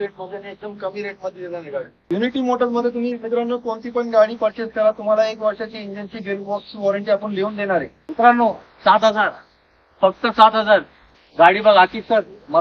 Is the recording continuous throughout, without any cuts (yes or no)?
no